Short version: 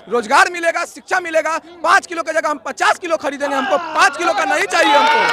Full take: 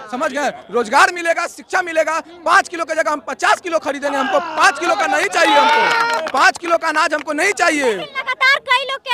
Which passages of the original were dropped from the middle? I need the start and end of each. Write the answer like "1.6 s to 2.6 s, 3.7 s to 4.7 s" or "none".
none